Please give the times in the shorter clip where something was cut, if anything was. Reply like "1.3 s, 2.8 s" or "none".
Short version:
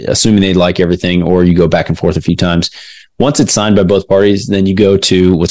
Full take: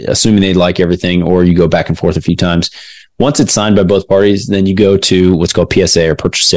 none